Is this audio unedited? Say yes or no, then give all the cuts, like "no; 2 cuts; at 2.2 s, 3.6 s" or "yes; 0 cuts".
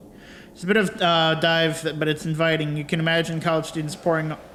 yes; 0 cuts